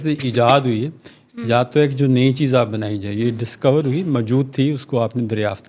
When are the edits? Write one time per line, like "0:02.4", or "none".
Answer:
none